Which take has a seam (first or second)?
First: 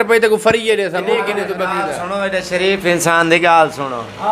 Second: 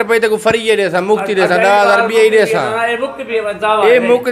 first